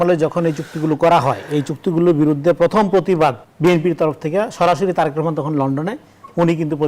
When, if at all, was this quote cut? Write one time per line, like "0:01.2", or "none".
0:03.5